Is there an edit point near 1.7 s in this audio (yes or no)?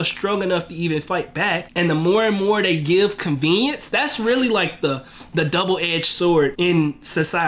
yes